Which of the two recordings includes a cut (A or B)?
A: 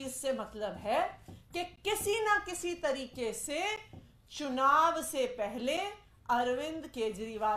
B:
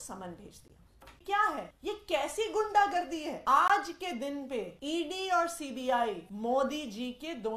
B